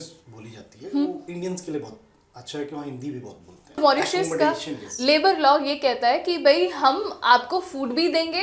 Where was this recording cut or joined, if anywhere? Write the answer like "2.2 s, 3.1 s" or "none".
3.8 s